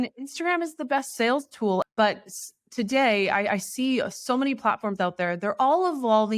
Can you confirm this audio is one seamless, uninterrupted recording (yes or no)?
no